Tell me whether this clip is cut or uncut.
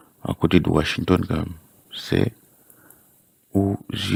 uncut